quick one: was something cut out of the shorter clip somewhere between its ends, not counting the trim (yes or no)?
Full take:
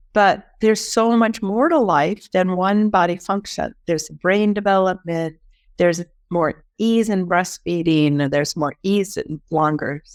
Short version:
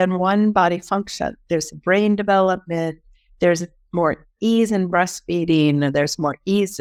no